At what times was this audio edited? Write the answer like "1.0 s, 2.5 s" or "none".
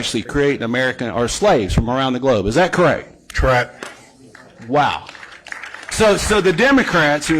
none